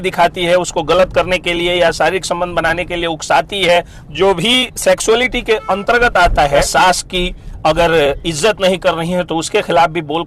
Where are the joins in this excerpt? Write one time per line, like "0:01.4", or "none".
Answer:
0:04.0
0:06.7